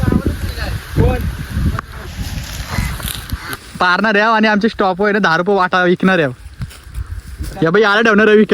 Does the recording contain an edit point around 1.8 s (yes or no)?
no